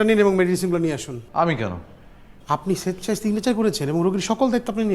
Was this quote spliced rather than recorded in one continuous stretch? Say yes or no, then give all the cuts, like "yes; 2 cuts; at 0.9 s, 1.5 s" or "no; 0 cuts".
no; 0 cuts